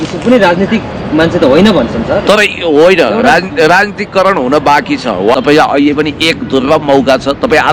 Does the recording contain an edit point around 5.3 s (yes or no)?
yes